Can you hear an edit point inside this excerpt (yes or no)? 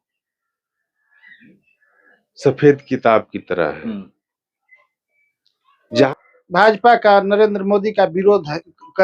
yes